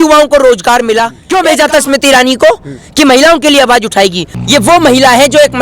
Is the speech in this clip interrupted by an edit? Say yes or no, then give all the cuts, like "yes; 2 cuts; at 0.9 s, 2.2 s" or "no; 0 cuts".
yes; 2 cuts; at 1.2 s, 4.3 s